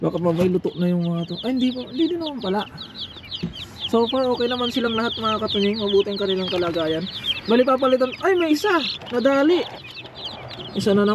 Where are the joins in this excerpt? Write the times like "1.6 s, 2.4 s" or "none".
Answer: none

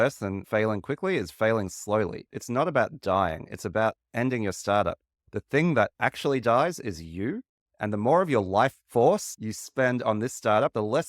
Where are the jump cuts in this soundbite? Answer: 2.2 s

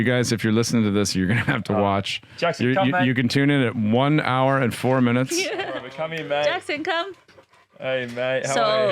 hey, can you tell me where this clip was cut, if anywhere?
5.9 s

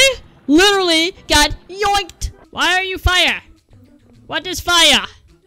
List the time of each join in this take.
2.5 s

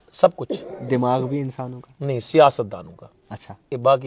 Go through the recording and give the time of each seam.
none

